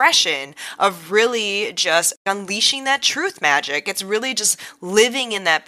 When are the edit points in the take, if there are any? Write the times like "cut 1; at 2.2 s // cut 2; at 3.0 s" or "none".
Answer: cut 1; at 2.2 s